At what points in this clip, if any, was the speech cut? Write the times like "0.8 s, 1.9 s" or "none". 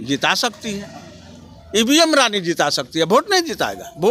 none

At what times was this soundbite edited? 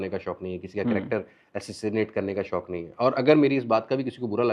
none

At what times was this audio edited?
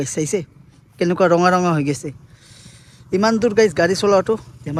none

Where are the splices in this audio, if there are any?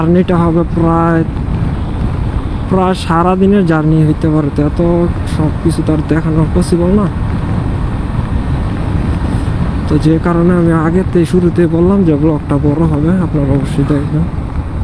none

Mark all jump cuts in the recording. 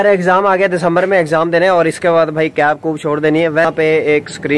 3.7 s

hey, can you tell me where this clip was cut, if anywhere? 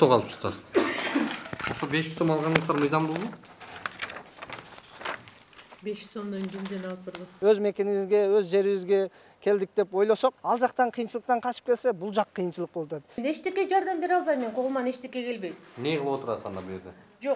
7.2 s, 10.4 s, 13.2 s

